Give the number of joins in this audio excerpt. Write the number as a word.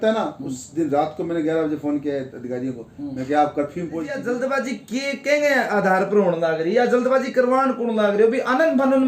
one